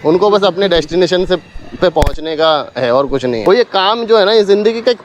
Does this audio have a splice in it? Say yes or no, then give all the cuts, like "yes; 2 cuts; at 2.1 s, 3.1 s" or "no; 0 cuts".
yes; 1 cut; at 3.4 s